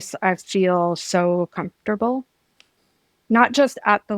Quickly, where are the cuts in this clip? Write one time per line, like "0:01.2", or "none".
none